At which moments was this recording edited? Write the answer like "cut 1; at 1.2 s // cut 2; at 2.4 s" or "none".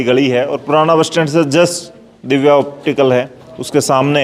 none